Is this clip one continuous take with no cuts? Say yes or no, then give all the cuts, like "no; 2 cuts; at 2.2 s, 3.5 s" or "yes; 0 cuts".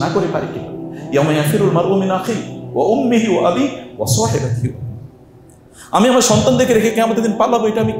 yes; 0 cuts